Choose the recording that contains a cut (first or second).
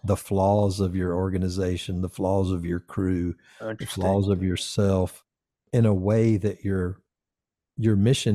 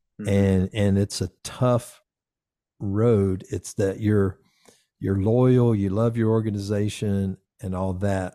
first